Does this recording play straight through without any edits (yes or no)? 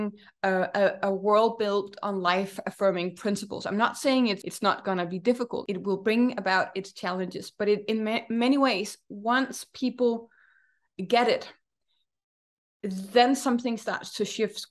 no